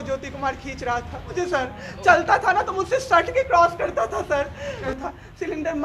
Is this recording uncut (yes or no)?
no